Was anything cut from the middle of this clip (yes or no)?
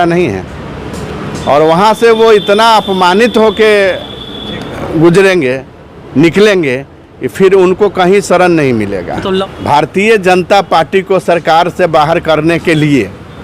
yes